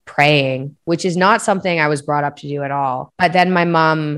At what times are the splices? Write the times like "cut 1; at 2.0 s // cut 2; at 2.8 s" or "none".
cut 1; at 3.1 s